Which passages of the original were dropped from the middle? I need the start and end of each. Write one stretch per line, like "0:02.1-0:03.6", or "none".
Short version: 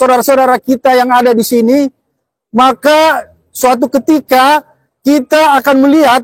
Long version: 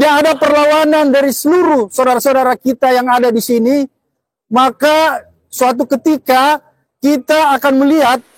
none